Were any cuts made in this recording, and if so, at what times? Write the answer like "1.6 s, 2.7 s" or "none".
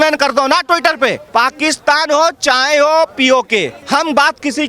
1.2 s, 3.8 s

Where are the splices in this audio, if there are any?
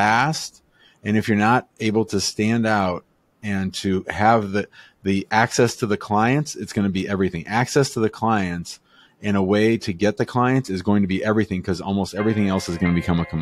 none

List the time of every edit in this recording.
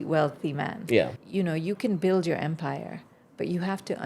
1.2 s

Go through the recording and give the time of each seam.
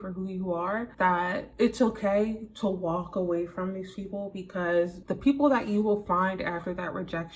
1.3 s, 5.0 s

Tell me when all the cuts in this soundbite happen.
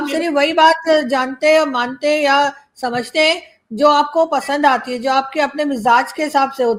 none

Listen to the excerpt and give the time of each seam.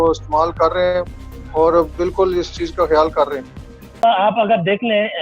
4.0 s

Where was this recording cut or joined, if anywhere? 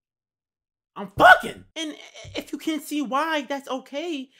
1.6 s

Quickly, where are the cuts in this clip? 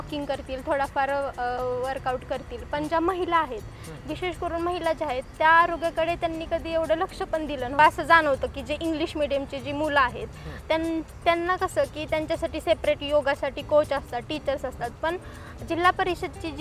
7.8 s

